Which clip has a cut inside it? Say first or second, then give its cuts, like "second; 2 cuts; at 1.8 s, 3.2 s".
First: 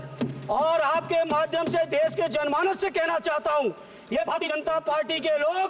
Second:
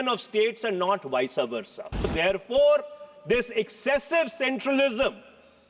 second; 1 cut; at 2.1 s